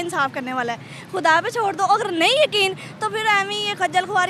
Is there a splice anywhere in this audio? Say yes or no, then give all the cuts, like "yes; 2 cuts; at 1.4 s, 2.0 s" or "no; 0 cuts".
no; 0 cuts